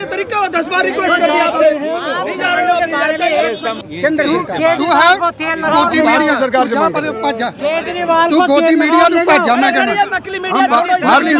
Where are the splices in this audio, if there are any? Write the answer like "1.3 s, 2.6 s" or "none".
3.8 s

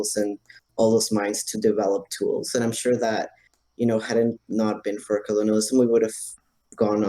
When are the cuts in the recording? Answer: none

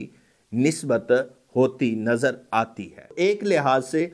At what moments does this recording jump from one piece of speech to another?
3.0 s

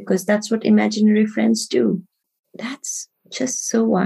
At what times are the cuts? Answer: 2.2 s

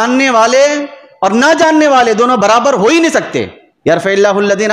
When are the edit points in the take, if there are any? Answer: 3.6 s

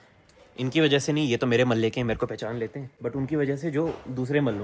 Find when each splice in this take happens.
2.9 s

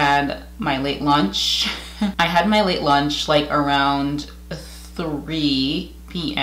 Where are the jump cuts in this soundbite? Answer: 2.1 s

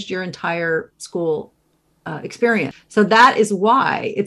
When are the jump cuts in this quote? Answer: 2.8 s

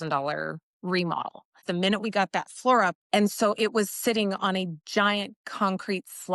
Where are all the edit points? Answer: 1.6 s, 3.0 s

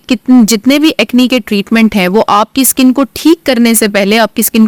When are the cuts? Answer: none

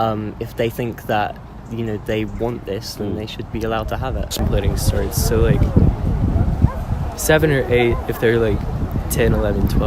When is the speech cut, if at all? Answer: 4.3 s

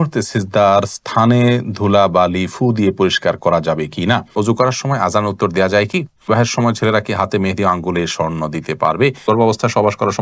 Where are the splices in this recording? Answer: 4.3 s, 6.3 s, 9.3 s

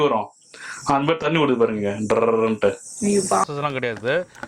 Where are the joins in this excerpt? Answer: 3.4 s

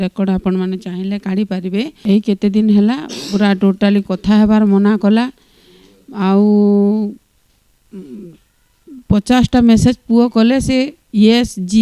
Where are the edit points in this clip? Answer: 1.9 s

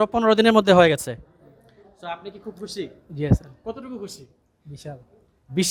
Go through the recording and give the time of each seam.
none

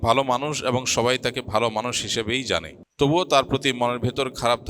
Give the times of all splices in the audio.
2.8 s

